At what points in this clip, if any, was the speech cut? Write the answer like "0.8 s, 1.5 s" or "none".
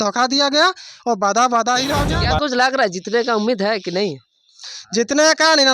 2.0 s